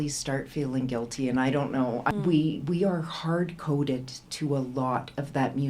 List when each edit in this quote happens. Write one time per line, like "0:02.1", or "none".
0:02.1